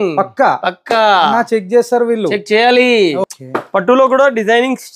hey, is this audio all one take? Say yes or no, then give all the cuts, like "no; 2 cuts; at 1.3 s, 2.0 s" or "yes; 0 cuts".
no; 1 cut; at 3.3 s